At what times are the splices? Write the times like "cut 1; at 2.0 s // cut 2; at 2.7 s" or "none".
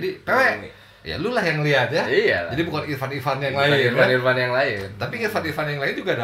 none